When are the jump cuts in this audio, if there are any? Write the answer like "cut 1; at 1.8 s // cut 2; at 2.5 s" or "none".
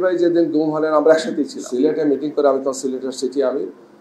cut 1; at 1.6 s

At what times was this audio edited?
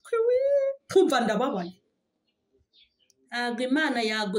none

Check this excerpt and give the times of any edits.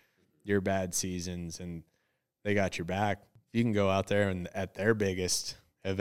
cut 1; at 3.3 s

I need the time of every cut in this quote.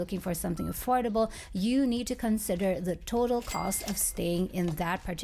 none

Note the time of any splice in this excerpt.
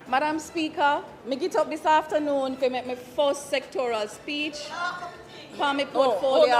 cut 1; at 1.1 s

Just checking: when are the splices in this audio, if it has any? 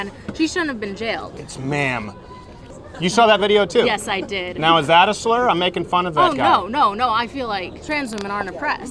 cut 1; at 1.3 s // cut 2; at 2.7 s // cut 3; at 7.8 s

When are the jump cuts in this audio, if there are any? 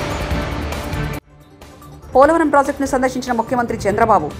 none

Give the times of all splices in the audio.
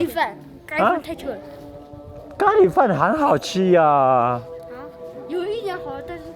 none

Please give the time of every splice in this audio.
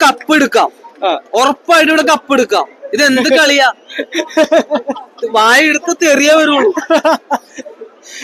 none

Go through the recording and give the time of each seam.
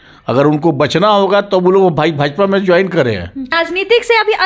cut 1; at 3.5 s

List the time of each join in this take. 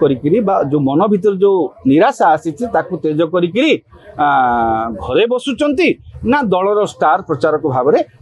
none

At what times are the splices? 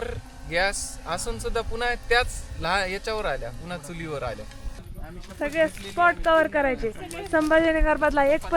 cut 1; at 4.9 s

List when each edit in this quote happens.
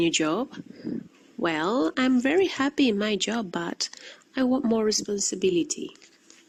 none

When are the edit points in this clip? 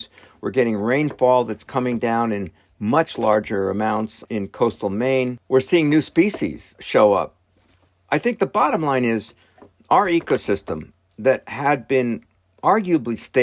cut 1; at 4.2 s // cut 2; at 5.4 s // cut 3; at 6.7 s

